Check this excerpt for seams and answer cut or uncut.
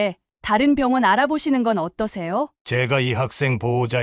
cut